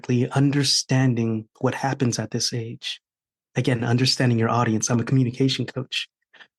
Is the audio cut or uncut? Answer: uncut